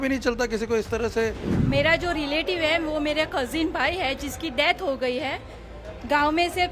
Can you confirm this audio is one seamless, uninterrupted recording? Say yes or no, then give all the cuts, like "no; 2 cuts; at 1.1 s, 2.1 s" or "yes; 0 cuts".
no; 1 cut; at 1.5 s